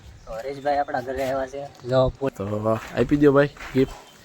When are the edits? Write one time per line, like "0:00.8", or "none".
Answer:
0:02.3